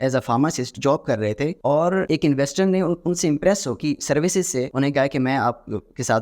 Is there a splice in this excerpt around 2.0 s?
yes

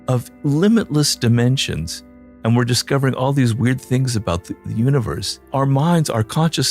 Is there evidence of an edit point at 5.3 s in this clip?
yes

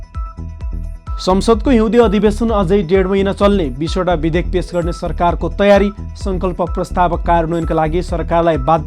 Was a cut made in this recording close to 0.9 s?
no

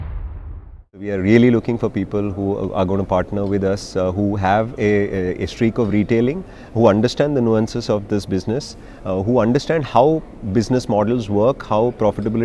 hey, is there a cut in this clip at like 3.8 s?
no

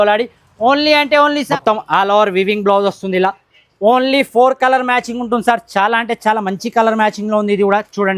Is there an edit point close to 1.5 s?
yes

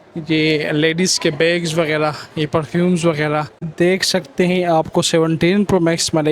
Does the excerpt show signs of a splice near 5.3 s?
no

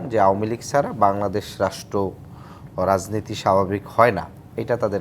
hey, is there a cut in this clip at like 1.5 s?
no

